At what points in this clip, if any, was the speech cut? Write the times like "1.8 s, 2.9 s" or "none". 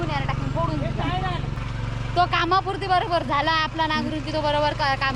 none